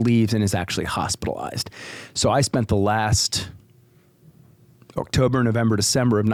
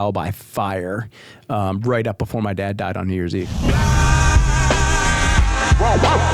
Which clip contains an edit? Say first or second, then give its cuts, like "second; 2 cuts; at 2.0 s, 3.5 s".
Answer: second; 1 cut; at 3.5 s